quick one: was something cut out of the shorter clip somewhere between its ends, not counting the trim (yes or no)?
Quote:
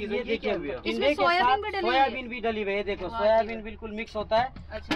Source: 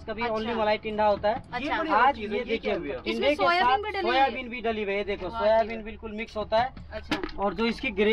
no